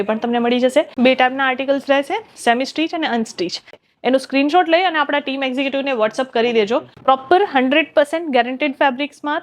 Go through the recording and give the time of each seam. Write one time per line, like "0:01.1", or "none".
0:00.9
0:03.8
0:06.9